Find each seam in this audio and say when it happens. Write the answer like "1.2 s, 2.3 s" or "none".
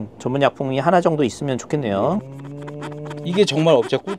2.4 s